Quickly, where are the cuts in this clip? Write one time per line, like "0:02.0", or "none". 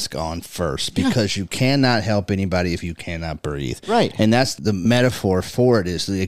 0:04.8

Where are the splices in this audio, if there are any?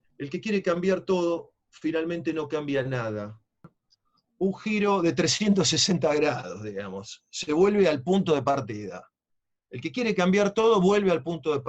0:03.7

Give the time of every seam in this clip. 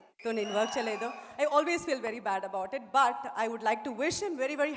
none

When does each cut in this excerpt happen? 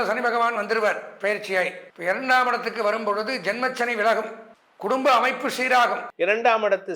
0:01.8
0:06.1

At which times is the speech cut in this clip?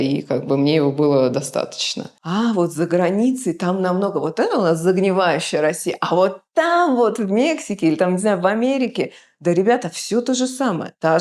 0:02.1

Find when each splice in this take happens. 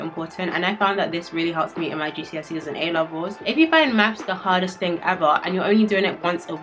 0:03.4

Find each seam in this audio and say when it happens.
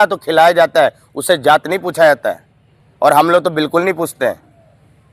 none

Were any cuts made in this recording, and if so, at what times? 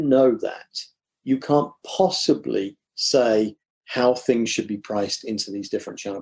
none

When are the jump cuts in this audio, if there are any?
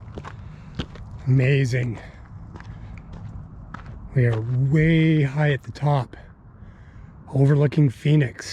none

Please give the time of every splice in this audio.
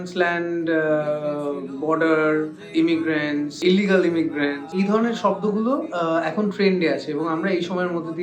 0:02.6
0:03.6

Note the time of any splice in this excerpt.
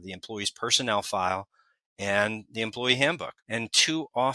0:03.3

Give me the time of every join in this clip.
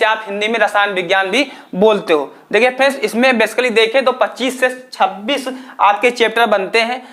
none

